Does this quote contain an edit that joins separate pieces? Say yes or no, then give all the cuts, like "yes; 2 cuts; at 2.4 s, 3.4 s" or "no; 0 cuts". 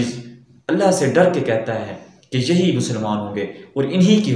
no; 0 cuts